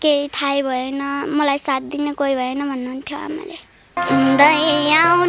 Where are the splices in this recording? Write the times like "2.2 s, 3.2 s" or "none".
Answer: 4.0 s